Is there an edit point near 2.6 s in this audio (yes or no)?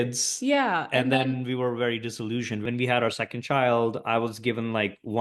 yes